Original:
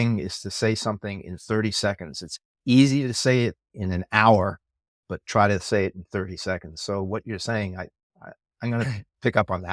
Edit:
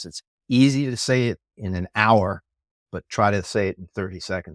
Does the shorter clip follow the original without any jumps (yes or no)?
yes